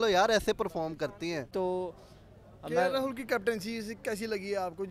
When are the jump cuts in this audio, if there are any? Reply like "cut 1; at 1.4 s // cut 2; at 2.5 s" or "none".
none